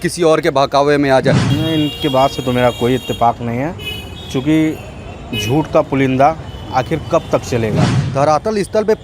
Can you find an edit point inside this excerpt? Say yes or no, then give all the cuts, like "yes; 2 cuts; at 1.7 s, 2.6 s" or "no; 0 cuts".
yes; 2 cuts; at 1.5 s, 8.0 s